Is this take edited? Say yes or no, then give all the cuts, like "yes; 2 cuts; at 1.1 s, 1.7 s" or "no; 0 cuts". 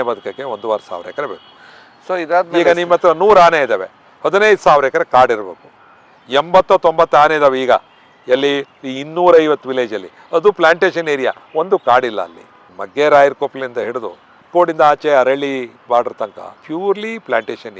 no; 0 cuts